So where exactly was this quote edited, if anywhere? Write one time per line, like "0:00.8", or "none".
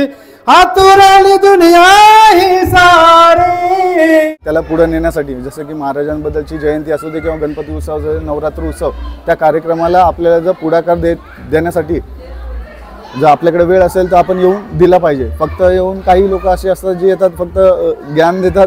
0:04.4